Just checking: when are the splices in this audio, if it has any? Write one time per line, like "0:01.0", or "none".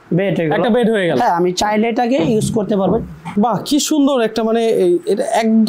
0:03.3